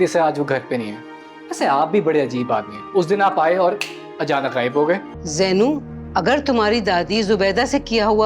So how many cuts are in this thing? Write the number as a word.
one